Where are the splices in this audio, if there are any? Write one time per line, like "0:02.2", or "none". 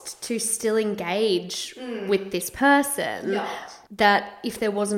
0:03.3